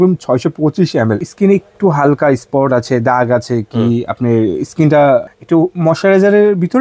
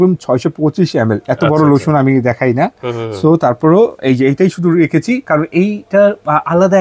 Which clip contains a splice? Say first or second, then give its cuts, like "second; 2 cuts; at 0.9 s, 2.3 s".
first; 2 cuts; at 1.3 s, 5.3 s